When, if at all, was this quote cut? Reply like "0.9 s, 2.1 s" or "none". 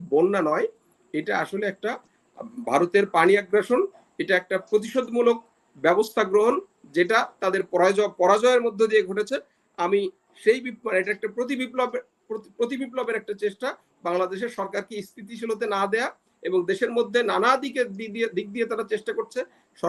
none